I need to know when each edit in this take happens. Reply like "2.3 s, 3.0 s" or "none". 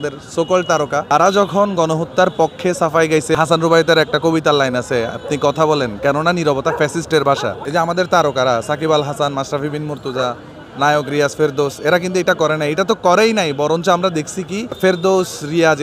1.1 s, 3.3 s, 7.6 s, 14.8 s